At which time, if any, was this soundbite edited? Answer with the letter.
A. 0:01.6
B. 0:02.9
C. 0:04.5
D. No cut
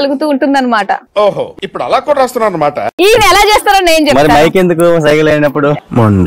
B